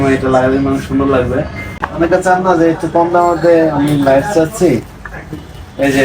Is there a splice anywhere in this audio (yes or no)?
yes